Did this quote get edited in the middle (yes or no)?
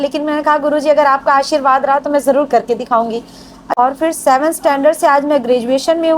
yes